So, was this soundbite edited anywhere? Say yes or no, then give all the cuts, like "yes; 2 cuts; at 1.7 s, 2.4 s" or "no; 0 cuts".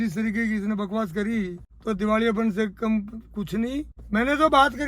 yes; 2 cuts; at 1.6 s, 4.0 s